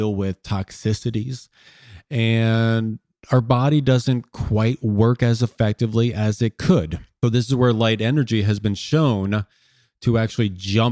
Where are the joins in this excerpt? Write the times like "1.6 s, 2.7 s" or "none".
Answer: 7.0 s